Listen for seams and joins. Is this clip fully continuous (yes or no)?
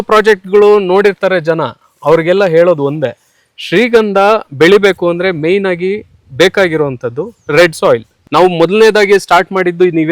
no